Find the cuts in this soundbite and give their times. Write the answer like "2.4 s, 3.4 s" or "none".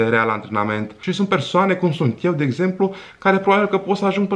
1.0 s